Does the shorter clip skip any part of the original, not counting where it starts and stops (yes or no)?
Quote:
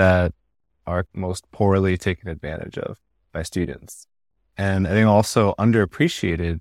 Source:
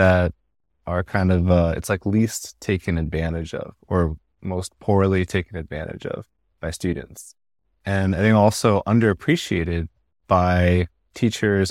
yes